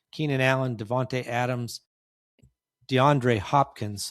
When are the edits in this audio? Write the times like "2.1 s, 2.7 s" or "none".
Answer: 2.3 s